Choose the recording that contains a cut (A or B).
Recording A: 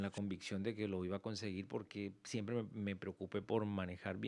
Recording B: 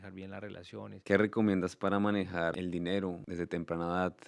B